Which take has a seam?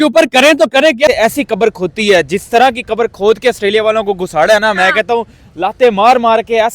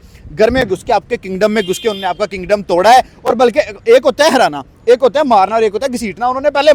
first; 1 cut; at 1.1 s

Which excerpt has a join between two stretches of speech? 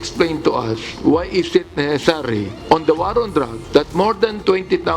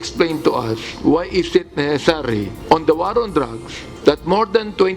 first; 1 cut; at 3.6 s

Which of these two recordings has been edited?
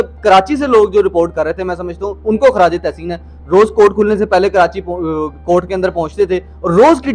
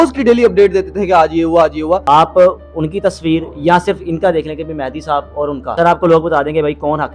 second; 2 cuts; at 2.0 s, 5.7 s

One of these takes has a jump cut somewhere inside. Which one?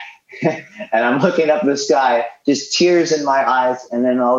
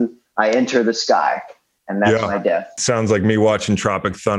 second; 1 cut; at 2.8 s

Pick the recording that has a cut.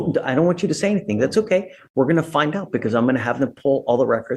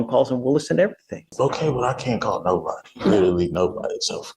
second; 1 cut; at 1.3 s

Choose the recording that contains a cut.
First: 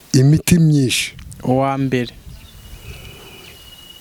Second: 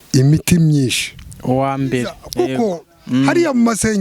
second; 1 cut; at 2.2 s

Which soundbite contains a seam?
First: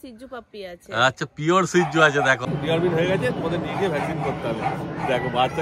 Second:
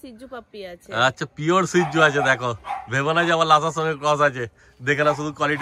first; 1 cut; at 2.5 s

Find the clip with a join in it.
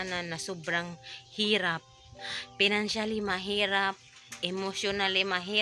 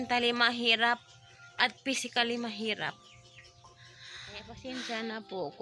second; 1 cut; at 4.5 s

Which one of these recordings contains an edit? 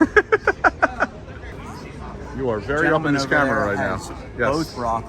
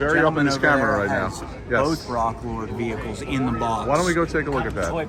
first; 1 cut; at 1.6 s

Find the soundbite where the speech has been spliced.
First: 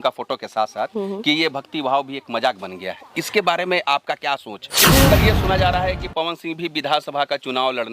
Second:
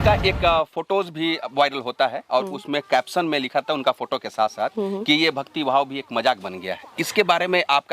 first; 1 cut; at 5.1 s

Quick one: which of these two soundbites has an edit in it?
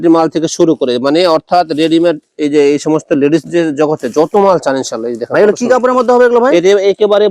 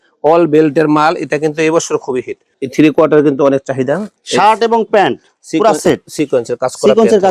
second; 2 cuts; at 2.5 s, 4.1 s

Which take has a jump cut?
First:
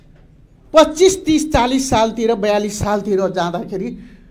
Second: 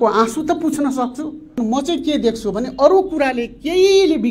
second; 1 cut; at 1.6 s

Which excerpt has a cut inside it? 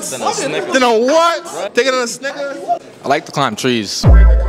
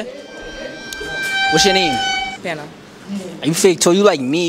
first; 2 cuts; at 1.7 s, 2.9 s

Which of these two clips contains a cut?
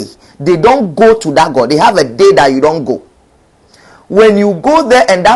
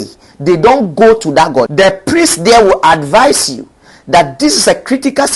second; 1 cut; at 1.7 s

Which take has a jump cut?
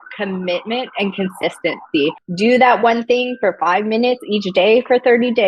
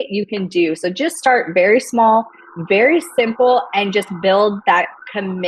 first; 1 cut; at 2.2 s

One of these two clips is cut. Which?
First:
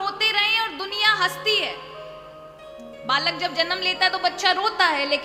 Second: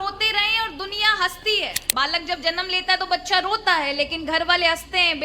second; 1 cut; at 1.8 s

